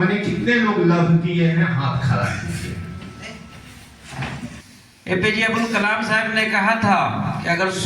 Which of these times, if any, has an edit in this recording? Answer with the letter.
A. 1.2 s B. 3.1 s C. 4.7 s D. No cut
C